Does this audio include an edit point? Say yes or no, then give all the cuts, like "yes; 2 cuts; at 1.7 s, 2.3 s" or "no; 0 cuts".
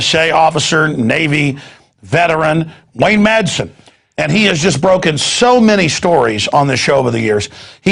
no; 0 cuts